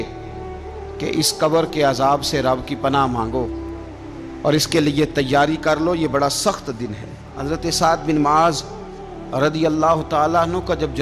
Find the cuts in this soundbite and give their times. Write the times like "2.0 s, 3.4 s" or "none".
7.3 s